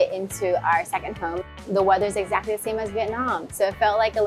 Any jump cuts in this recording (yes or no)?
yes